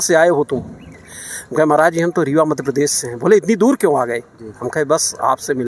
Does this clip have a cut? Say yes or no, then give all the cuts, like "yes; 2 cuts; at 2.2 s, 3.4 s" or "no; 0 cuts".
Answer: no; 0 cuts